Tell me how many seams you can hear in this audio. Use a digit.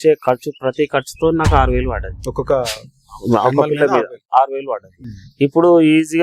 0